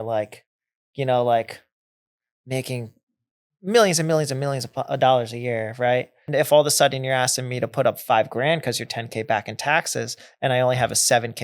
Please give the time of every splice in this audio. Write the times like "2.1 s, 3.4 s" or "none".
6.3 s